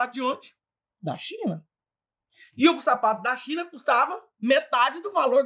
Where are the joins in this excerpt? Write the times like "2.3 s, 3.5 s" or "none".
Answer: none